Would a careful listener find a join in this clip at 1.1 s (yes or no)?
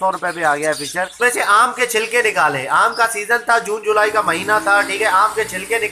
yes